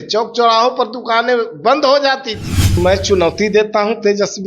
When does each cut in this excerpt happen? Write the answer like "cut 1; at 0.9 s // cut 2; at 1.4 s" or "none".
cut 1; at 2.8 s